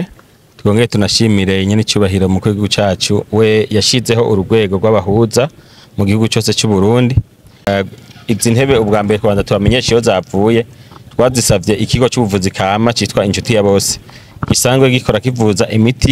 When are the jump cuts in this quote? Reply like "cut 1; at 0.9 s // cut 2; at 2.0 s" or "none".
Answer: cut 1; at 7.7 s